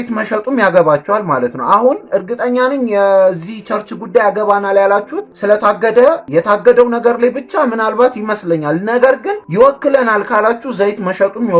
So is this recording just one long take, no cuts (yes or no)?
yes